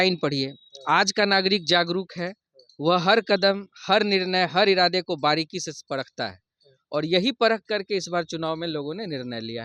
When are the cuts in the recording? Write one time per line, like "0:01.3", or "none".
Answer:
none